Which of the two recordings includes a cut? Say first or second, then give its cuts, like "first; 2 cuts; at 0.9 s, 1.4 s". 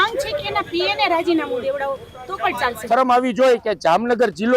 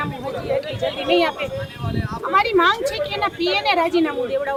first; 1 cut; at 2.8 s